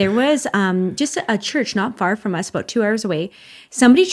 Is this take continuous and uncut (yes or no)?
yes